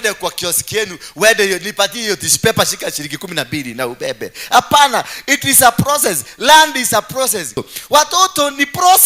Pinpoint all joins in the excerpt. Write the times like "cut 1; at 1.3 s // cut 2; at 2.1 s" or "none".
cut 1; at 7.7 s